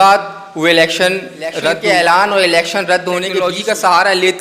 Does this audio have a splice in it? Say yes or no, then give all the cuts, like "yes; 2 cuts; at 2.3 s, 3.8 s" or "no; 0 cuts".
yes; 2 cuts; at 1.7 s, 3.4 s